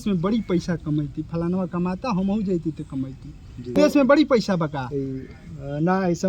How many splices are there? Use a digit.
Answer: 1